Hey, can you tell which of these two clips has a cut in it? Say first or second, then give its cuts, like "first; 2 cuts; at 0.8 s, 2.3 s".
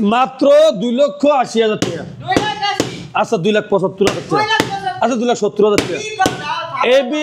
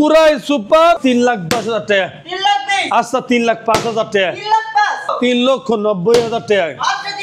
second; 2 cuts; at 1.0 s, 5.1 s